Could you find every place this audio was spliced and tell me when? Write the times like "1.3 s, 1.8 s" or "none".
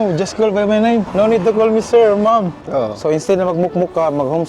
1.1 s, 2.6 s